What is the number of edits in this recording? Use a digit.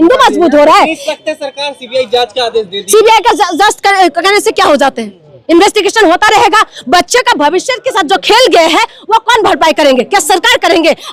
0